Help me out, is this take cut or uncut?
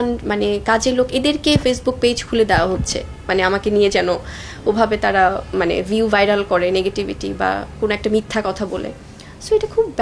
uncut